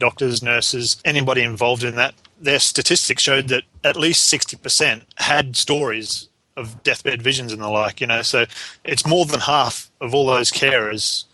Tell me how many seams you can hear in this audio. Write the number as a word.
four